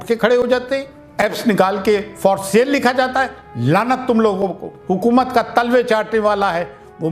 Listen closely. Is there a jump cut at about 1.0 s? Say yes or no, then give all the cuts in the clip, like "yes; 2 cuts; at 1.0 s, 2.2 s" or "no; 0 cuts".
yes; 2 cuts; at 1.0 s, 4.7 s